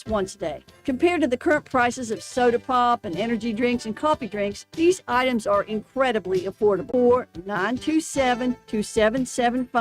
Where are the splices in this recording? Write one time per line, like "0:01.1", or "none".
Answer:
0:06.9